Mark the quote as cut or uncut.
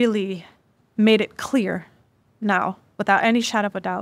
uncut